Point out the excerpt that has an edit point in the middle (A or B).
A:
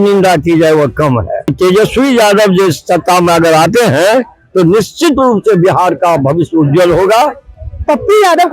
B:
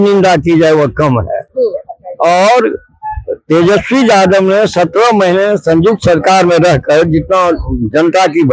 A